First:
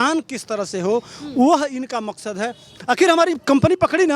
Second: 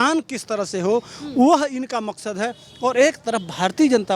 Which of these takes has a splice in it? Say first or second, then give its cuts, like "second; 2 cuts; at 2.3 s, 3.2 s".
first; 1 cut; at 2.7 s